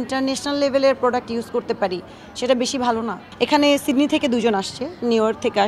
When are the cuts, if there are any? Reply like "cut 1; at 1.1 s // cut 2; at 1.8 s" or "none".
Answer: cut 1; at 3.2 s